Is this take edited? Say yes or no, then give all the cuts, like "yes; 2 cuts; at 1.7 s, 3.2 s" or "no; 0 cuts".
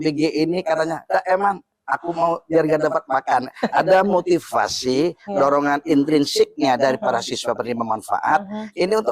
no; 0 cuts